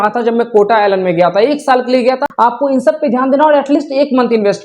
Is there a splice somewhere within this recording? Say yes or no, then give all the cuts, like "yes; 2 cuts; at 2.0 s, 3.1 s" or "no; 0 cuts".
yes; 1 cut; at 2.3 s